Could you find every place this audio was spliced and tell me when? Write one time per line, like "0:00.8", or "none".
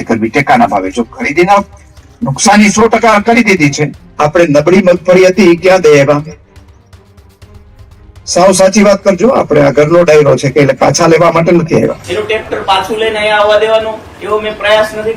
0:04.0
0:12.1